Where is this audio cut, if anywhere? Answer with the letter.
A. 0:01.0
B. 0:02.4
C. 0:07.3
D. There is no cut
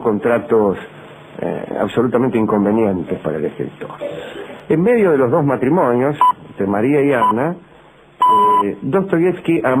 D